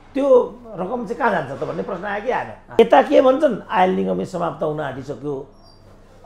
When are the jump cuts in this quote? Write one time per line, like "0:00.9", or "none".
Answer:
0:02.8